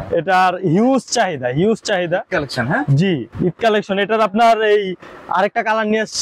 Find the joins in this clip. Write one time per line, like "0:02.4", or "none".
none

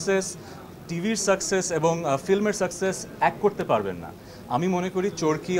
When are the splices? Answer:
none

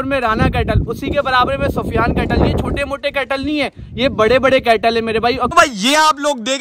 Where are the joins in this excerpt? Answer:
0:05.4

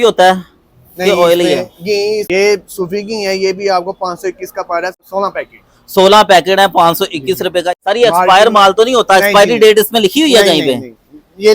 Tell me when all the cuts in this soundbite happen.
0:02.3
0:05.0
0:07.7

